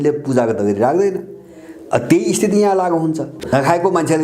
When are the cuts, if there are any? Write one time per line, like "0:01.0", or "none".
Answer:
0:03.3

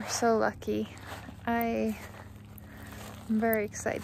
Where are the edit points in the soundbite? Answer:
none

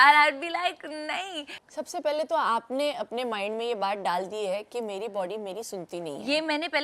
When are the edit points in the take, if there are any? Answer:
0:01.6

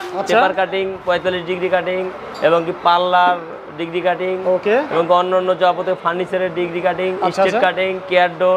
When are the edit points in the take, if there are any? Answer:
none

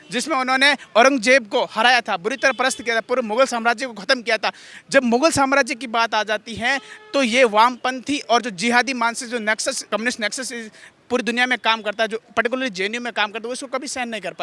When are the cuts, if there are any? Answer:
0:09.9

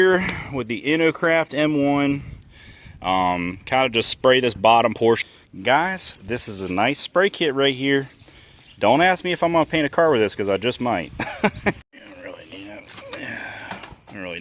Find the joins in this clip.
0:05.2
0:11.8

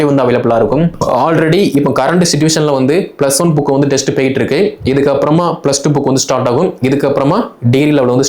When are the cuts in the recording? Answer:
0:01.0

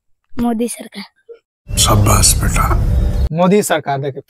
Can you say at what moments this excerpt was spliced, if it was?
0:01.5
0:03.3

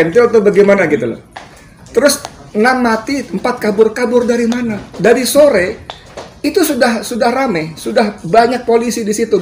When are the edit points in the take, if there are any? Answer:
none

